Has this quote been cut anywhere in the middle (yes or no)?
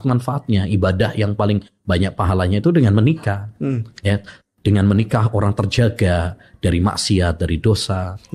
no